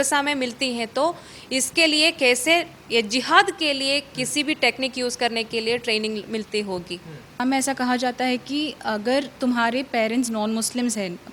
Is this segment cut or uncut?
cut